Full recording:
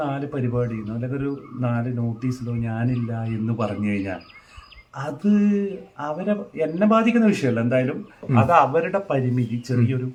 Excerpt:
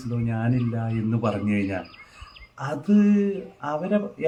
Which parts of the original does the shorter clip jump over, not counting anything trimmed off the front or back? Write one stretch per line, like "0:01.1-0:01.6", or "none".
none